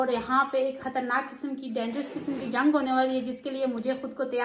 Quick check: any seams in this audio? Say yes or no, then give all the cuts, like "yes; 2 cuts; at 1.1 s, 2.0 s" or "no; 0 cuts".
no; 0 cuts